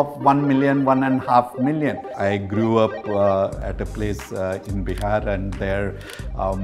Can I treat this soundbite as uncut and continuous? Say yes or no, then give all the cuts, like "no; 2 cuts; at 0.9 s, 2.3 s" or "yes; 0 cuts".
no; 2 cuts; at 2.1 s, 3.6 s